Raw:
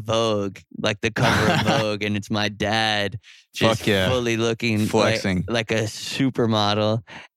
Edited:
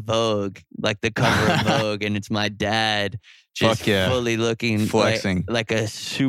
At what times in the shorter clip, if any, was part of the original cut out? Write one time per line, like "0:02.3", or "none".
none